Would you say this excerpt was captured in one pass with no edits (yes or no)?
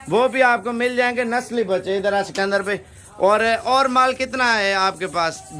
yes